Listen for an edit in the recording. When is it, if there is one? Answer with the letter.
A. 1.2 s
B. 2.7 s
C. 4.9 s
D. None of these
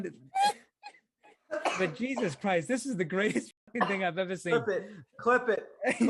D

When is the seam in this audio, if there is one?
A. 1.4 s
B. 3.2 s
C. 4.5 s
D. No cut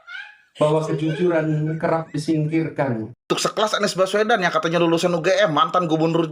B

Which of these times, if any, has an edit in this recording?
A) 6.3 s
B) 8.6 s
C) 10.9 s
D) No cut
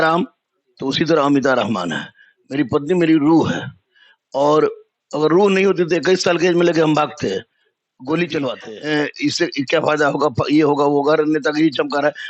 B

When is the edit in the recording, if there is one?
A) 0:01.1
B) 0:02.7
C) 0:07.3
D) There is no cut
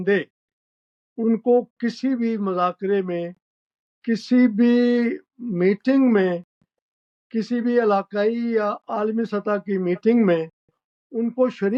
D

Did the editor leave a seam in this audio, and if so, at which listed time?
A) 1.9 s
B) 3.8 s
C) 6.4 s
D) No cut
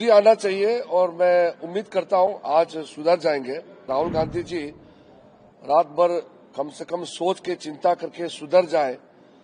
B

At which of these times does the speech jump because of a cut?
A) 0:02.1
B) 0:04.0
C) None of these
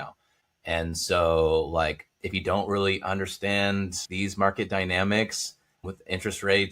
B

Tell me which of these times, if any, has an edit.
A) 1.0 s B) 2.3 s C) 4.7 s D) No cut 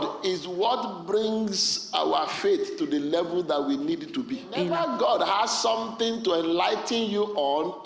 C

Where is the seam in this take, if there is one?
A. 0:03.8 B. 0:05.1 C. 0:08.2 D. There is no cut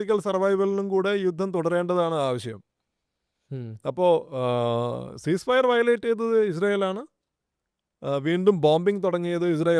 D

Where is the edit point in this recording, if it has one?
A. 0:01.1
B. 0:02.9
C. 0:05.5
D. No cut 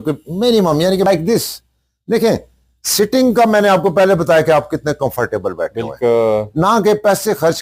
A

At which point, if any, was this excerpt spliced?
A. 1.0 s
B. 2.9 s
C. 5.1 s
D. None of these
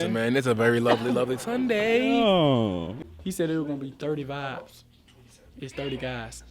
B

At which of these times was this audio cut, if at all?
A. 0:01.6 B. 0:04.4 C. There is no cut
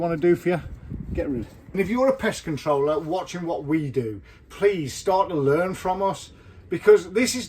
A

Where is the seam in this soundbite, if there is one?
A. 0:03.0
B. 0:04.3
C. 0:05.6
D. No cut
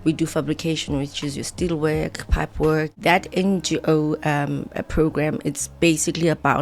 A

